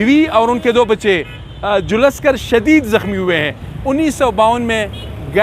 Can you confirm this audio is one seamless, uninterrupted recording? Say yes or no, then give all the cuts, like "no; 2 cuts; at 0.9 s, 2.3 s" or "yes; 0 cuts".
no; 1 cut; at 3.7 s